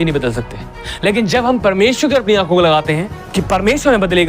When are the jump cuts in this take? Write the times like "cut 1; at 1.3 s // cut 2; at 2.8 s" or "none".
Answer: cut 1; at 3.2 s